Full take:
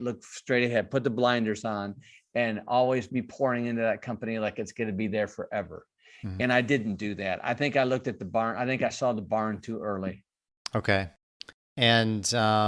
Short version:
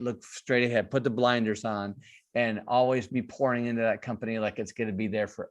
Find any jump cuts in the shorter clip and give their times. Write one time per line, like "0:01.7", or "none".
none